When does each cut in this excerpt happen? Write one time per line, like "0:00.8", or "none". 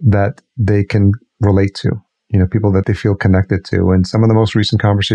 0:02.8